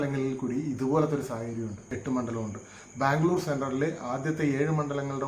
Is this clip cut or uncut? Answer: cut